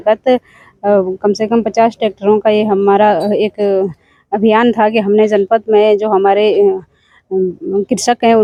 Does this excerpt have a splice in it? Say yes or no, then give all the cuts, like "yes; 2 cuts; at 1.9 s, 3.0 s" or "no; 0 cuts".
no; 0 cuts